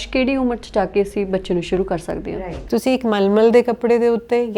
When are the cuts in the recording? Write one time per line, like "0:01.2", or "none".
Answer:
0:02.7